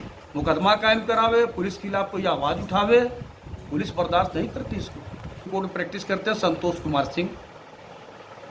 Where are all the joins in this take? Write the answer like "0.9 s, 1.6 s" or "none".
5.5 s